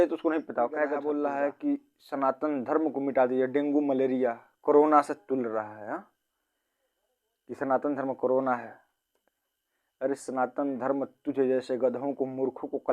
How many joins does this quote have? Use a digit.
1